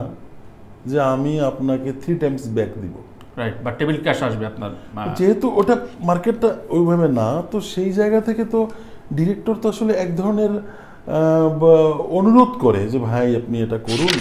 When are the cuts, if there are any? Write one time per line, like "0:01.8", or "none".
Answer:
none